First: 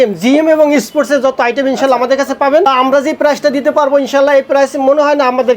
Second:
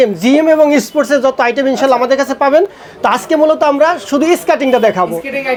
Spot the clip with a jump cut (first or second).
first